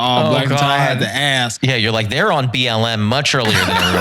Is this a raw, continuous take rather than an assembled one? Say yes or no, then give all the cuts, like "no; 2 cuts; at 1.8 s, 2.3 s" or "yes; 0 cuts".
no; 1 cut; at 1.5 s